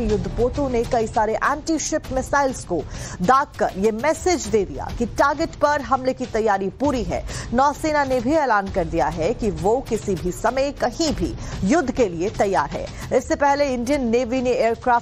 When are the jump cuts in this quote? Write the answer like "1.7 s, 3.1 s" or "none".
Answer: none